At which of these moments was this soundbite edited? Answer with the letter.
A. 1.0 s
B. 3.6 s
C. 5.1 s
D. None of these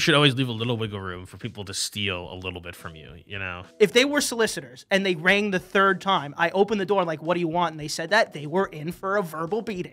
B